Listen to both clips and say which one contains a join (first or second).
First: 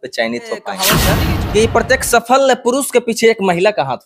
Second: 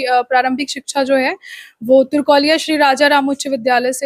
first